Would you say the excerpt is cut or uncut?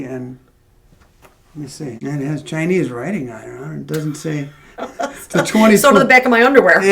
cut